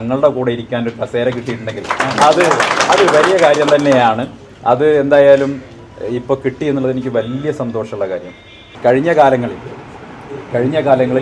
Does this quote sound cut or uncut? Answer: cut